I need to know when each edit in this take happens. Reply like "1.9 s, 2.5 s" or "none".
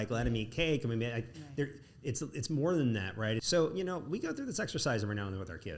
3.4 s

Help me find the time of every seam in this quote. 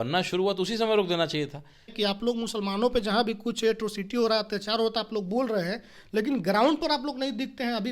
1.9 s

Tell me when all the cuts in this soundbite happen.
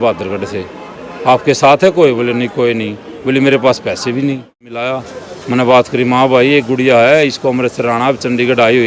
4.8 s

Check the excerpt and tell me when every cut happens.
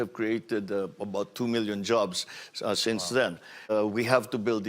3.7 s

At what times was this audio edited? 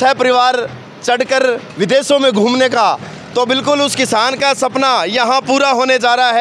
none

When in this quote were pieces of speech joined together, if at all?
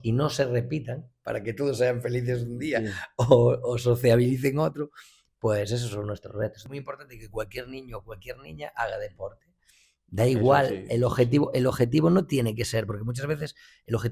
6.6 s

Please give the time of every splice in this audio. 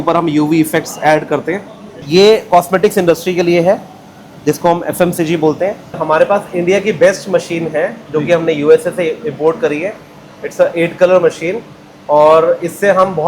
2.0 s, 6.0 s

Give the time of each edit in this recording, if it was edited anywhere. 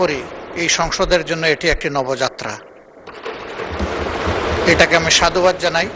none

